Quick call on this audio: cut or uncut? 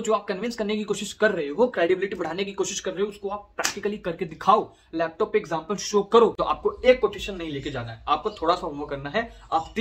cut